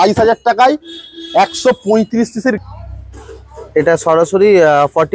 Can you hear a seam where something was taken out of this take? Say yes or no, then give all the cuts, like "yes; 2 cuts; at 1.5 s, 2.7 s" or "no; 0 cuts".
yes; 1 cut; at 2.6 s